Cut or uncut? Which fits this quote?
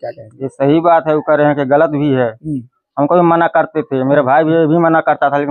uncut